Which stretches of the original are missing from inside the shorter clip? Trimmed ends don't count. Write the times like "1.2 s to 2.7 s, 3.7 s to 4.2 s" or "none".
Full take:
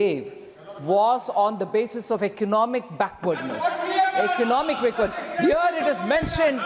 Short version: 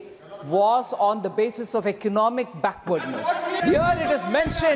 3.9 s to 5.3 s